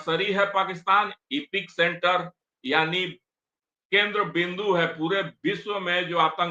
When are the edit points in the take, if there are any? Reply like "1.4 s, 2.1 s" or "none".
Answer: none